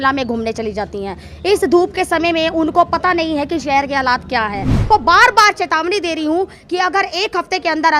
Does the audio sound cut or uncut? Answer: cut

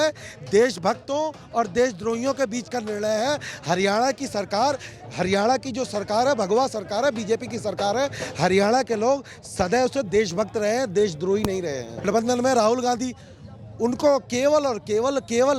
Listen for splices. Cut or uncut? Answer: cut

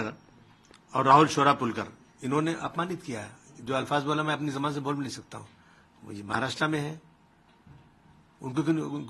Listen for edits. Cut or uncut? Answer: uncut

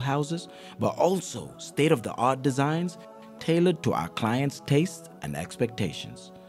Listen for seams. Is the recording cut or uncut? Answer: uncut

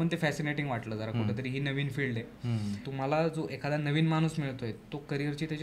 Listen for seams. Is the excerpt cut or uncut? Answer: cut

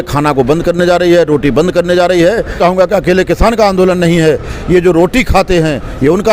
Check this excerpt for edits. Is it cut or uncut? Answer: cut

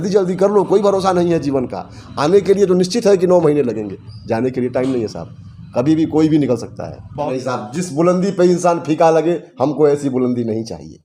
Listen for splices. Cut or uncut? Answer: cut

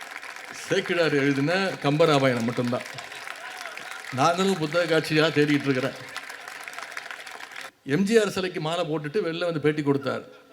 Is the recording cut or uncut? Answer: cut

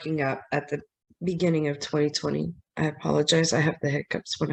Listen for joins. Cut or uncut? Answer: uncut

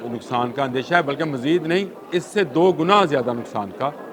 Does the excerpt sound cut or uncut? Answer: cut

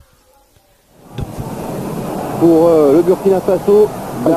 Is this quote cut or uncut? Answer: cut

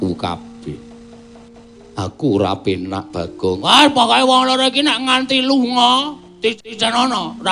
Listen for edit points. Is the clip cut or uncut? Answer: uncut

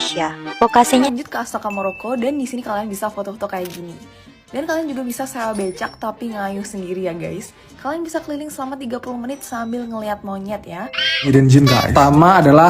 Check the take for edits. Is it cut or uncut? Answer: cut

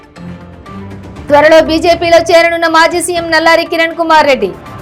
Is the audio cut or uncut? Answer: cut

